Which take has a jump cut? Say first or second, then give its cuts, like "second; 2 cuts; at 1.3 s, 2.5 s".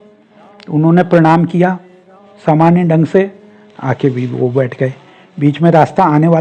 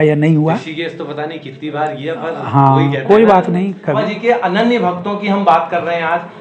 second; 1 cut; at 4.0 s